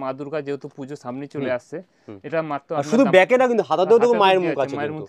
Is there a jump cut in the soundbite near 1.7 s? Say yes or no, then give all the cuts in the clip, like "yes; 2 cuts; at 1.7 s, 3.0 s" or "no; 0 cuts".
no; 0 cuts